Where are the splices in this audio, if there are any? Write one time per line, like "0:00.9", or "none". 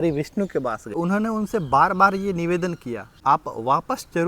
0:00.9
0:03.1